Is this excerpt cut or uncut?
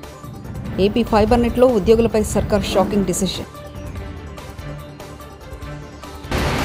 uncut